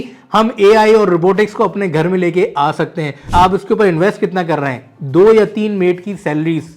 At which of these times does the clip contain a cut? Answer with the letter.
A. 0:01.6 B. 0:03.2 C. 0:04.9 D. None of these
B